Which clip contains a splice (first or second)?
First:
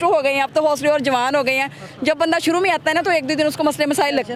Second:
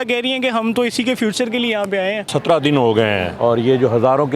second